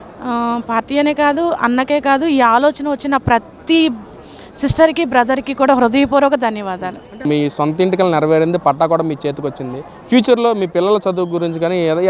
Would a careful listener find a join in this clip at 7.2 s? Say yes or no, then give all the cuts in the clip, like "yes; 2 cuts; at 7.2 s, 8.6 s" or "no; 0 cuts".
yes; 1 cut; at 7.2 s